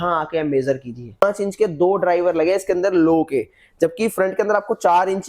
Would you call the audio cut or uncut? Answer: cut